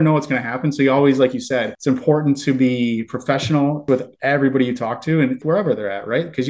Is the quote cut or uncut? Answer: cut